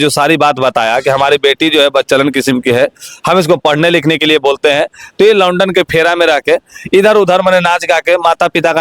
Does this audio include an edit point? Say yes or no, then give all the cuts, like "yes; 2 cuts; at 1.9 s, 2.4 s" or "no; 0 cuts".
no; 0 cuts